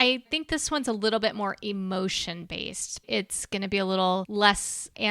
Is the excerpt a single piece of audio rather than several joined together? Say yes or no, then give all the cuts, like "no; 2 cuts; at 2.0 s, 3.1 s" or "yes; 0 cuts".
no; 2 cuts; at 3.1 s, 4.3 s